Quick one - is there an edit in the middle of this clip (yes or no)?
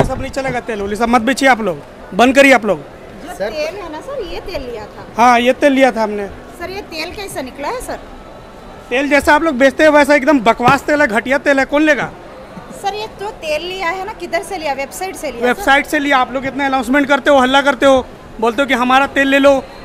no